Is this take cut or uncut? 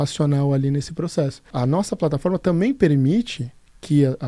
cut